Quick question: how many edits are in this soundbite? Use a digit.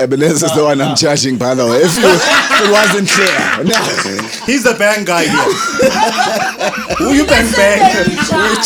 0